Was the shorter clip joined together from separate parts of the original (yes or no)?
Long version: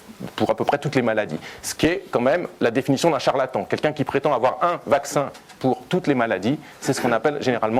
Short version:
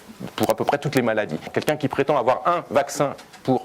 yes